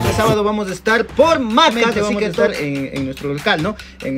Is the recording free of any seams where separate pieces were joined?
no; 1 cut; at 1.9 s

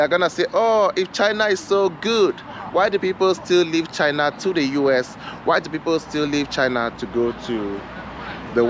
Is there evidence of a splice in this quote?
no; 0 cuts

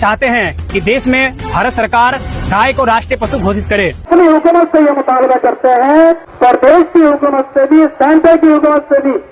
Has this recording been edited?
yes; 2 cuts; at 4.1 s, 6.3 s

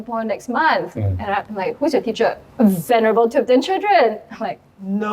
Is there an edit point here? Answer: yes; 1 cut; at 2.4 s

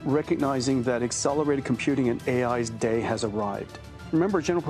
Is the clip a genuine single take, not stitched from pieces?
yes; 0 cuts

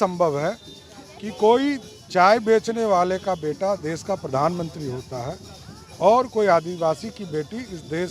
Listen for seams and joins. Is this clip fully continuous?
yes; 0 cuts

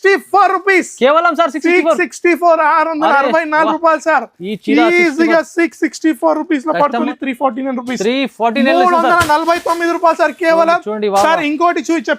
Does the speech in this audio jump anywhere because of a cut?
yes; 1 cut; at 7.0 s

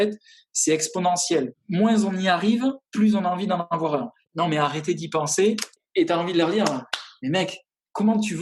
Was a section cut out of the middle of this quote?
yes; 3 cuts; at 1.6 s, 4.2 s, 5.8 s

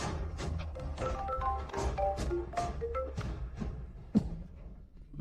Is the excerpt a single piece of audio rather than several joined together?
yes; 0 cuts

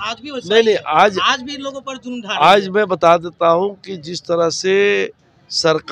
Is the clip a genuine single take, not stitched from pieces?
yes; 0 cuts

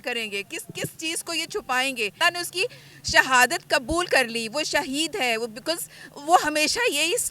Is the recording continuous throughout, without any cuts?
no; 1 cut; at 2.2 s

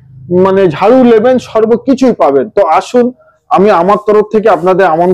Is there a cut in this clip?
no; 0 cuts

